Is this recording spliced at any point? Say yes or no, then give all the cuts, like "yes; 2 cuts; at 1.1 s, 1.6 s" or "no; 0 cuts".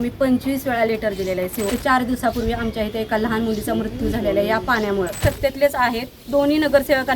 yes; 2 cuts; at 1.7 s, 5.2 s